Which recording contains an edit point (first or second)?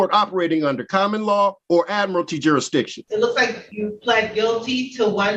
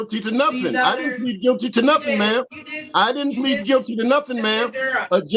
first